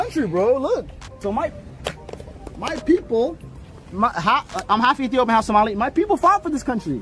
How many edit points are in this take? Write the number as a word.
zero